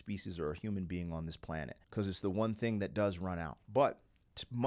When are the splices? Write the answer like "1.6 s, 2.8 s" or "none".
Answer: 1.8 s, 3.6 s

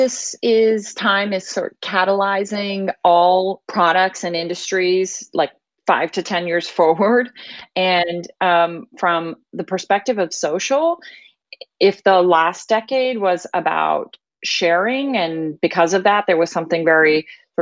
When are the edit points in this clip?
3.6 s, 5.7 s

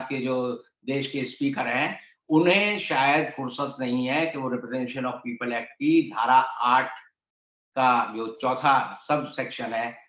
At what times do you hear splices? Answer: none

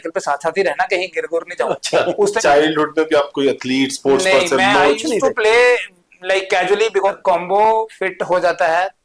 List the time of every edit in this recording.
2.4 s, 7.1 s

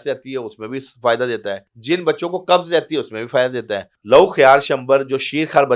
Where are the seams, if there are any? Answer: 1.7 s, 3.9 s

